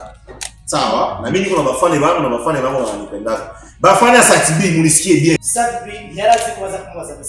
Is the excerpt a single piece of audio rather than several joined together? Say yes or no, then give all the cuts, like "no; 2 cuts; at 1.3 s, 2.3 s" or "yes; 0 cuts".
no; 1 cut; at 5.5 s